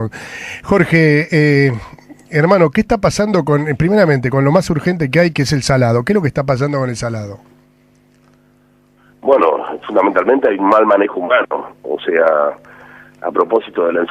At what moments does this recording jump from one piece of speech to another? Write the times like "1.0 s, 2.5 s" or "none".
11.1 s